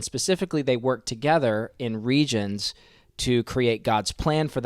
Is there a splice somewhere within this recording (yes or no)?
no